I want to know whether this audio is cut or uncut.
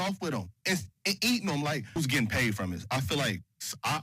cut